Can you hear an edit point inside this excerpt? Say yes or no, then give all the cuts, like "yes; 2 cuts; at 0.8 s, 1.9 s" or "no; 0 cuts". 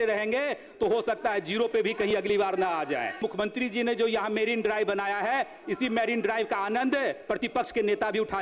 yes; 1 cut; at 3.2 s